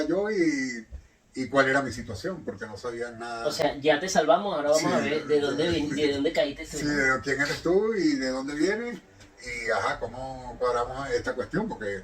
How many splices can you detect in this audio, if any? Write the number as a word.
zero